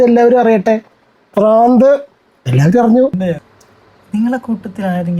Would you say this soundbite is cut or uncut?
cut